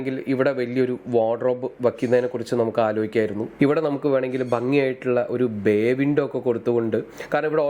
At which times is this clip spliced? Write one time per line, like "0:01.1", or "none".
0:03.5